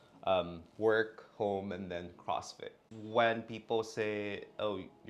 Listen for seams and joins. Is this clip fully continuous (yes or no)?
no